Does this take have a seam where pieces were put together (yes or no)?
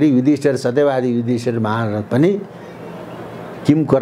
no